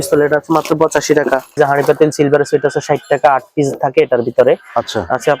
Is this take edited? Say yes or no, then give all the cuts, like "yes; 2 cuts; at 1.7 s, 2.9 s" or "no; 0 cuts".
yes; 1 cut; at 1.6 s